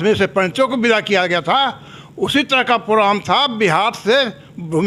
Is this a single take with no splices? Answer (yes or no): yes